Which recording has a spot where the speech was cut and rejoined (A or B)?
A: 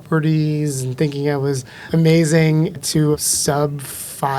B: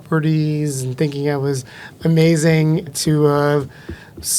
A